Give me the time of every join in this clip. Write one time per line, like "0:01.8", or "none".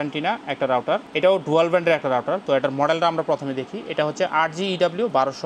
0:01.1